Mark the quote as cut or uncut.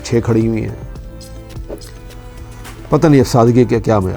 cut